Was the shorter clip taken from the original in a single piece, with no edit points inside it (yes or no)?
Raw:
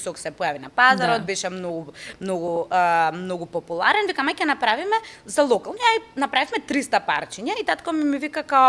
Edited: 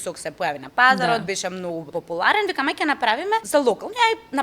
no